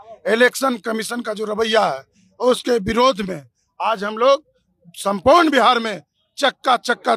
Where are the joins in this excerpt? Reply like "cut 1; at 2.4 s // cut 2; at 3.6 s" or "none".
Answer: none